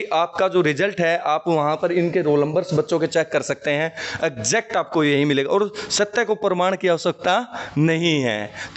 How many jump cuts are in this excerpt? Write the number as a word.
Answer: zero